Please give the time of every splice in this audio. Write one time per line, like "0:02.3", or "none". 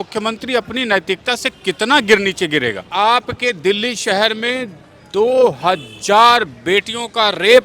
0:02.9